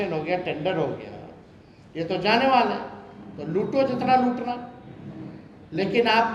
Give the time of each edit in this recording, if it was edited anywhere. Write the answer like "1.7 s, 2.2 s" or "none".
none